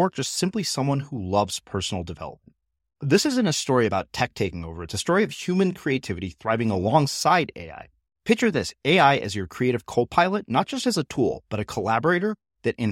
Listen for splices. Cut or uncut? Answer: uncut